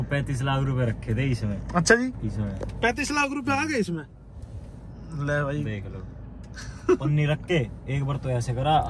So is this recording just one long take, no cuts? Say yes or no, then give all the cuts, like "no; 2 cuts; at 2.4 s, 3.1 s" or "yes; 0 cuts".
yes; 0 cuts